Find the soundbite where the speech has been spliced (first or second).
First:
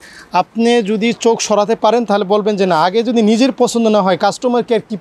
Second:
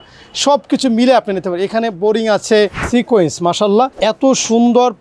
second